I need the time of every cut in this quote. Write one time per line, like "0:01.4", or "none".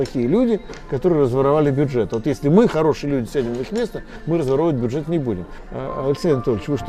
0:05.6